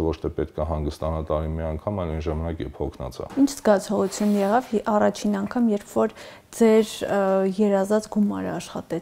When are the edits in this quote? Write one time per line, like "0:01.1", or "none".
0:03.2

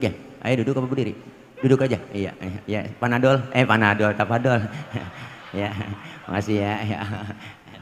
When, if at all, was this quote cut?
none

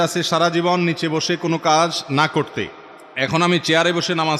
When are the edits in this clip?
none

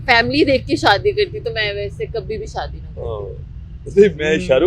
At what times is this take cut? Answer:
none

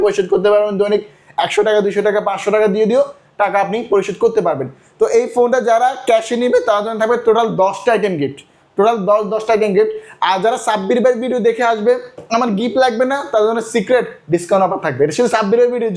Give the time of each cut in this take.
none

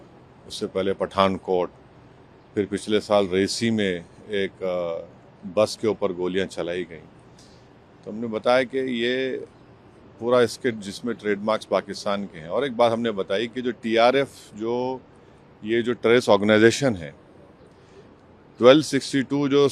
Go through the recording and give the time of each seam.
none

